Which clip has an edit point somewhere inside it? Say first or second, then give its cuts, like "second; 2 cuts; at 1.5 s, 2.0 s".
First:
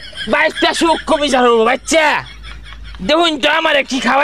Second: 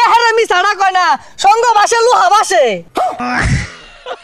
second; 1 cut; at 3.2 s